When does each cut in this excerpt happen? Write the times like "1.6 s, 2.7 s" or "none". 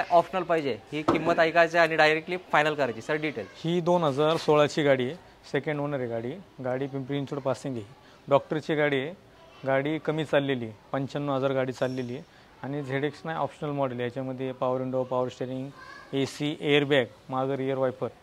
none